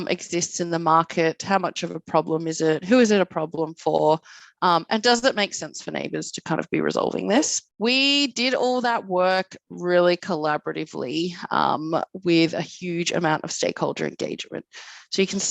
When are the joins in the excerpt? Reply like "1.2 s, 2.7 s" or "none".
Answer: 7.6 s

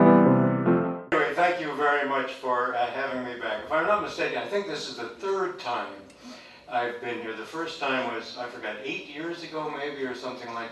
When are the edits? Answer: 0.9 s

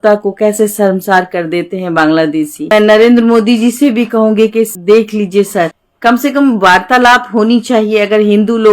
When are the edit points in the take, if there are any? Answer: 2.7 s, 4.8 s, 5.8 s

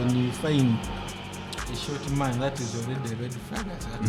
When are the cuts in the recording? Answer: none

